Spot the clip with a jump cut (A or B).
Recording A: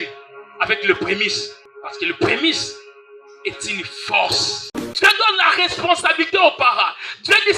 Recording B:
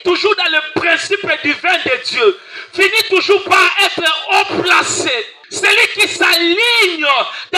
A